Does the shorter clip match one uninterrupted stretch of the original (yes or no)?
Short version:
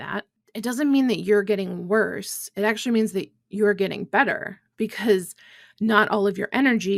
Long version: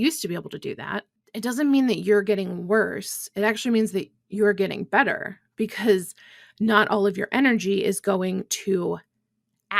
yes